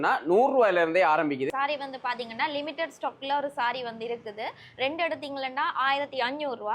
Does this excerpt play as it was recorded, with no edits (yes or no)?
no